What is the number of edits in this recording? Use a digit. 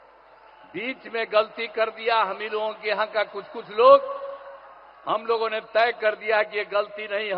0